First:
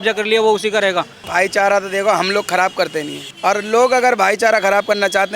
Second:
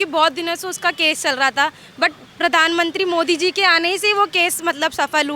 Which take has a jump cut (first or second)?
first